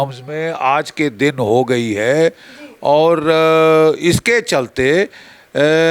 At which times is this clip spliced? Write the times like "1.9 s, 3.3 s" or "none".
none